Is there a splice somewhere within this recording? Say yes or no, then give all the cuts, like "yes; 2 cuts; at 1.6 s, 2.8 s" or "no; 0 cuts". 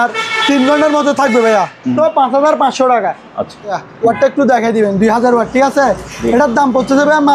yes; 2 cuts; at 1.9 s, 3.8 s